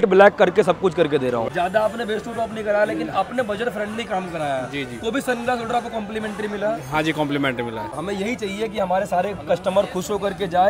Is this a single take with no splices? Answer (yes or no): no